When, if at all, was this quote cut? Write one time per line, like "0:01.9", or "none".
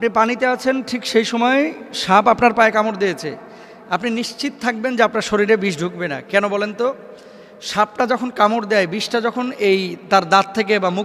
none